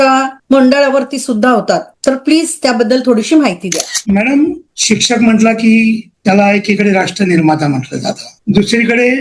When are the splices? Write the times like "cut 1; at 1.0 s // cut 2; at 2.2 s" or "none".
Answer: cut 1; at 3.9 s